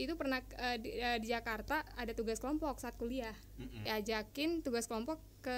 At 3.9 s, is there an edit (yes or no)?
yes